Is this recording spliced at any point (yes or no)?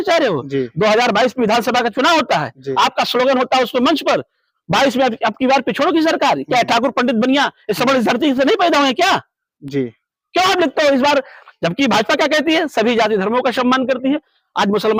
no